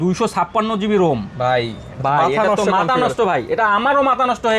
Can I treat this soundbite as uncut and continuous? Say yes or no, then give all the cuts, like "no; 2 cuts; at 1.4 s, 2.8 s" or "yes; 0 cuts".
yes; 0 cuts